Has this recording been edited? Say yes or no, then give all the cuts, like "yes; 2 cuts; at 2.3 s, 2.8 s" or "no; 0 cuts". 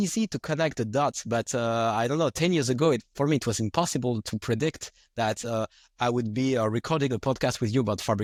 no; 0 cuts